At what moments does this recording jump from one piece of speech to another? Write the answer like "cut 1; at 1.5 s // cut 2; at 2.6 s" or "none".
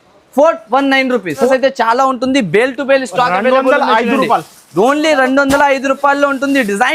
cut 1; at 1.5 s